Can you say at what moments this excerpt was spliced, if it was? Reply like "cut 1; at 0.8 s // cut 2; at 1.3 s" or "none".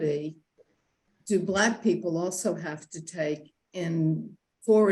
none

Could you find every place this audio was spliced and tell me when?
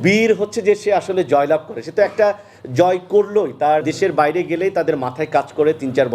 cut 1; at 3.9 s

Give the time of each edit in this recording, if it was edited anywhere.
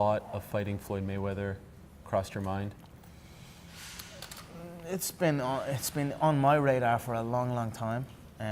none

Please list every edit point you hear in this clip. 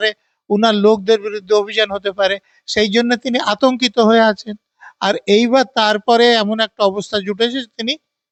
none

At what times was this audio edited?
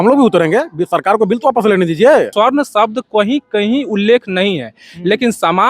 cut 1; at 2.3 s

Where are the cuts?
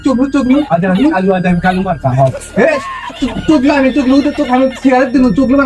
none

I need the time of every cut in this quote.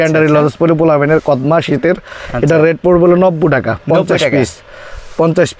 none

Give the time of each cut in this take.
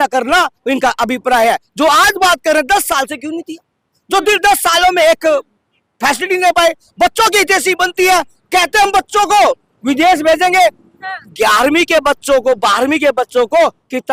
none

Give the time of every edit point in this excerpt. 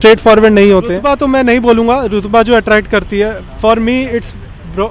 cut 1; at 1.0 s

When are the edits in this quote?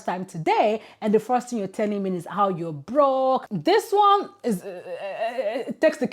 cut 1; at 3.5 s

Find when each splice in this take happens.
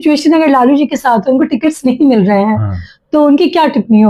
none

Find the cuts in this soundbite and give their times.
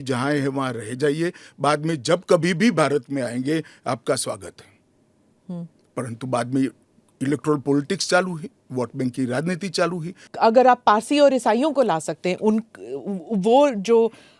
cut 1; at 10.2 s

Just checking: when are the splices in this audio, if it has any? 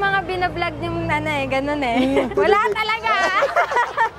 cut 1; at 2.3 s

